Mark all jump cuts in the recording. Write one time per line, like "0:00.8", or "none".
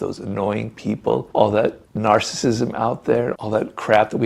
0:01.3